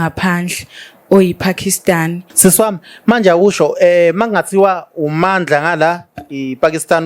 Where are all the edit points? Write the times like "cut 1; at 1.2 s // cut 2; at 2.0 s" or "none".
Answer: cut 1; at 2.2 s